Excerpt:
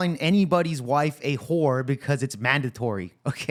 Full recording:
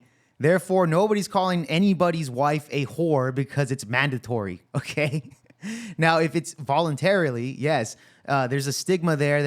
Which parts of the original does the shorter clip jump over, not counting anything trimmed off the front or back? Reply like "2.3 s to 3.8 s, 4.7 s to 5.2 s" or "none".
none